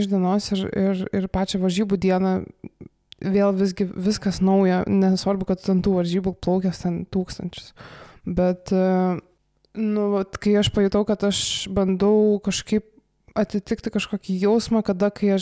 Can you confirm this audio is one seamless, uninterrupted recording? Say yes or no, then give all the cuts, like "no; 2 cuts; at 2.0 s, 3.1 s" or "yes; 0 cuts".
yes; 0 cuts